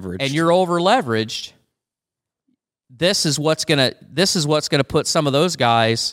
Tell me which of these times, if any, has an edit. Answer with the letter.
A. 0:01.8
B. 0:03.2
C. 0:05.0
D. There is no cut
D